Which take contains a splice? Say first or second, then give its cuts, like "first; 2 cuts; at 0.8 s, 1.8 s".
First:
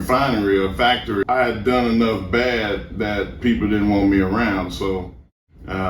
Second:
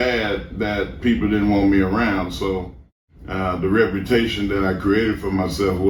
first; 1 cut; at 1.2 s